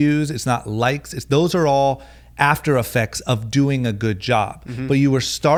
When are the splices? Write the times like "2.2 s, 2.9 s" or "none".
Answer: none